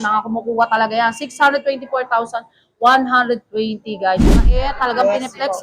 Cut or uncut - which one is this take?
cut